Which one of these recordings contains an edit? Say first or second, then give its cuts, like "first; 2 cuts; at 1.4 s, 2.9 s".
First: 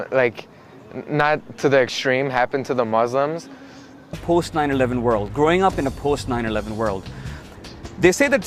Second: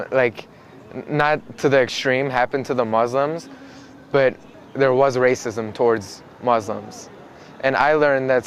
second; 1 cut; at 4.0 s